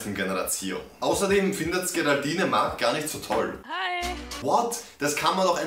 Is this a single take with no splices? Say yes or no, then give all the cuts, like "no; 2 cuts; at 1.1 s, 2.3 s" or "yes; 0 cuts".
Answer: no; 2 cuts; at 0.9 s, 4.4 s